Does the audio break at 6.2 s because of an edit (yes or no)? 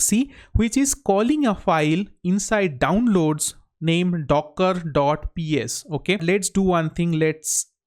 yes